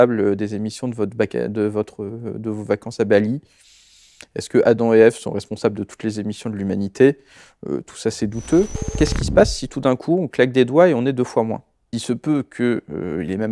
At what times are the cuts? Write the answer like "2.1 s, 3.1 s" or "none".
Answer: 8.9 s, 11.9 s